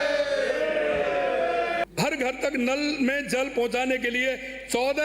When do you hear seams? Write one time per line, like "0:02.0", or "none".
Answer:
0:01.9